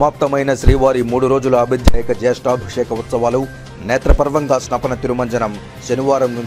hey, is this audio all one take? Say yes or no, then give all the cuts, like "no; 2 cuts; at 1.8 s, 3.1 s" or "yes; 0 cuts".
yes; 0 cuts